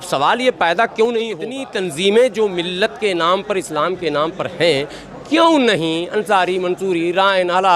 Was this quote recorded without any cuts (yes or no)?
no